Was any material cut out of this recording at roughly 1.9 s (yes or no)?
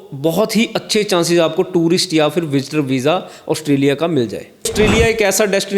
no